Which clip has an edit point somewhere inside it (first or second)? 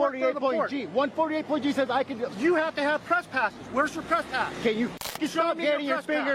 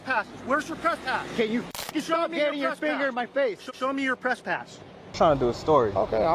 second